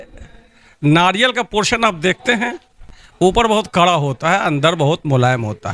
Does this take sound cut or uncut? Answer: uncut